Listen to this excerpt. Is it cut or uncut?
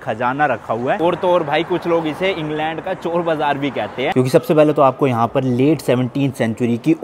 cut